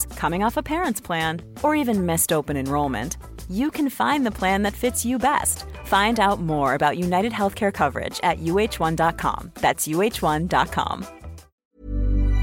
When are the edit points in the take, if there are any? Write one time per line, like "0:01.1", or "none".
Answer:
0:11.5